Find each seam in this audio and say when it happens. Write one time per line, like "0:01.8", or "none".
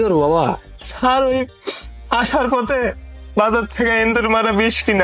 none